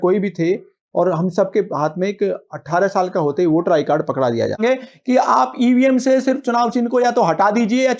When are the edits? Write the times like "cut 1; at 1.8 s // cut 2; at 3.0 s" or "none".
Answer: cut 1; at 4.6 s